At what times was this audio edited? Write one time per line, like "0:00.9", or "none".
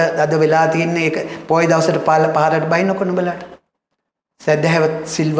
none